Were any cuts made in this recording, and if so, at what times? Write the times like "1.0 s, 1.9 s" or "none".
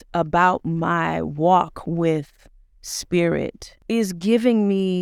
3.7 s